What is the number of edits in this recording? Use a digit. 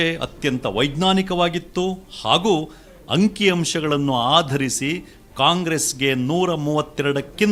0